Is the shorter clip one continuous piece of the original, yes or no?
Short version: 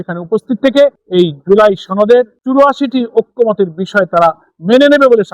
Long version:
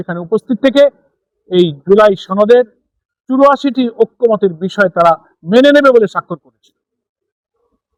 no